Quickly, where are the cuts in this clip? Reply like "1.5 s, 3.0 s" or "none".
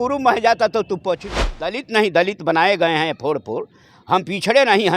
1.7 s

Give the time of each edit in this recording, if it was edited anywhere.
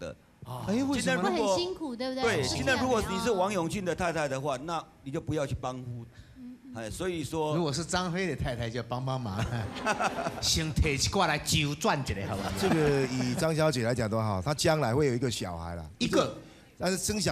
12.5 s

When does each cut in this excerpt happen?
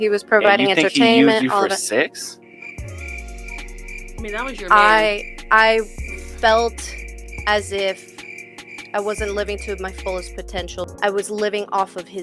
10.9 s

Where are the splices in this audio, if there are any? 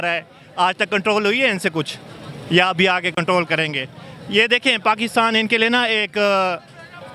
none

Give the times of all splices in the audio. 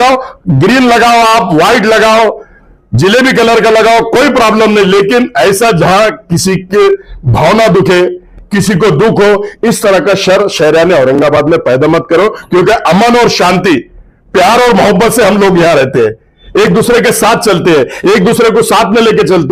none

